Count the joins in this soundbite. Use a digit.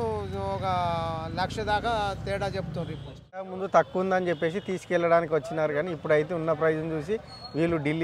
1